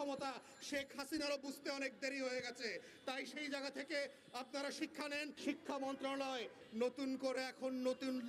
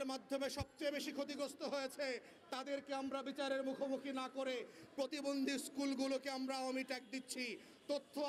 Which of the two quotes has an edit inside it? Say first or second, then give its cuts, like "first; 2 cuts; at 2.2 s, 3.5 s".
first; 2 cuts; at 5.3 s, 6.6 s